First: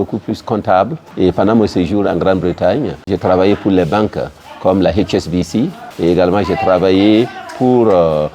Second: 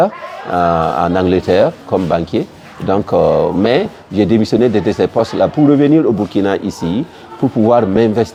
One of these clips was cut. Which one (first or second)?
first